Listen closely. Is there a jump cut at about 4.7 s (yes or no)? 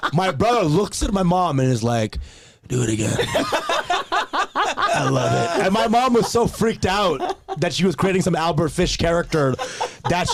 no